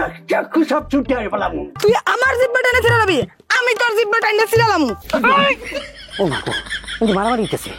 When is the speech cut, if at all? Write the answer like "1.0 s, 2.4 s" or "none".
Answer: 1.7 s